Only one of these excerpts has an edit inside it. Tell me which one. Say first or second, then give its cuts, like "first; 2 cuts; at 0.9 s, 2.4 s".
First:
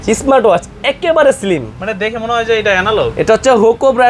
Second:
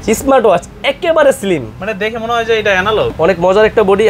second; 1 cut; at 3.1 s